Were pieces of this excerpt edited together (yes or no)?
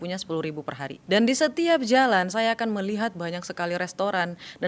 yes